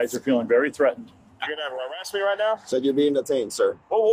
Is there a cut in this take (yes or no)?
yes